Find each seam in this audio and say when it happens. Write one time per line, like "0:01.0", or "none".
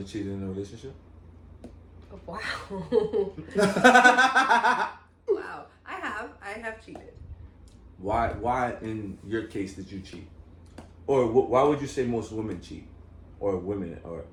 none